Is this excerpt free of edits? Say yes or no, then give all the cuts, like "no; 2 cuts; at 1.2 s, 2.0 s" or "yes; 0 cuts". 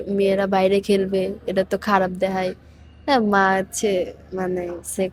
yes; 0 cuts